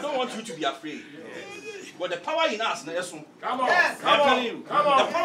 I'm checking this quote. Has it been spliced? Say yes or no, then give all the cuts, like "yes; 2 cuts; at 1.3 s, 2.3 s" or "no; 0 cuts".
no; 0 cuts